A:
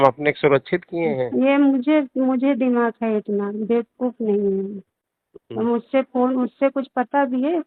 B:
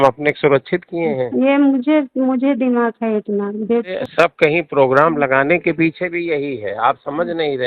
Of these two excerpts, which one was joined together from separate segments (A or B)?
B